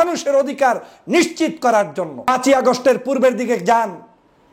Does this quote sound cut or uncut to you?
cut